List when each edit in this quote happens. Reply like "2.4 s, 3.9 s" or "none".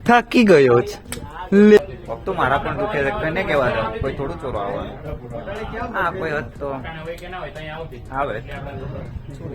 1.9 s